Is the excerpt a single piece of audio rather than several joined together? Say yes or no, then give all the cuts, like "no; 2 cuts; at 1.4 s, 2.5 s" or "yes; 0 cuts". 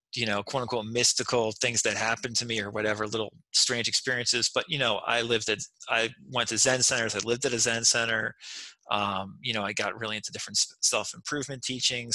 yes; 0 cuts